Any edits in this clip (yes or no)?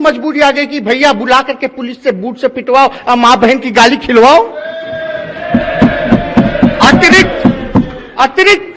no